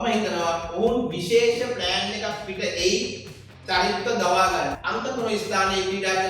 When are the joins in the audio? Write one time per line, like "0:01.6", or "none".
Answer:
0:04.8